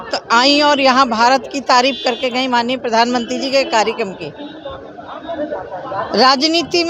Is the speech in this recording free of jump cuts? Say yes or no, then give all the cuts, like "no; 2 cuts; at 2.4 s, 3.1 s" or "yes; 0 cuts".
yes; 0 cuts